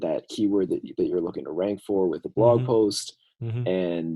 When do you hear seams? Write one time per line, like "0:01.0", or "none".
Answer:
none